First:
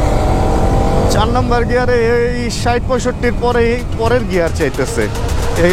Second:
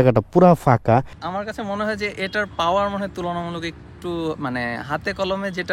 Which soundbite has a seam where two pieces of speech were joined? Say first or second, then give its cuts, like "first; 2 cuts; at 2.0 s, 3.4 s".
second; 1 cut; at 1.1 s